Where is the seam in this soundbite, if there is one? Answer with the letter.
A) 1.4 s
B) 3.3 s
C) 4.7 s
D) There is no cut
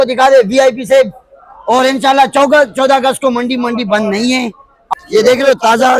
C